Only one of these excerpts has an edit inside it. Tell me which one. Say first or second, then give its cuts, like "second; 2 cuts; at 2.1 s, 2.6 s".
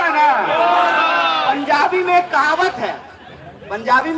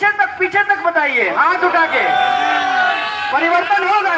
first; 1 cut; at 1.4 s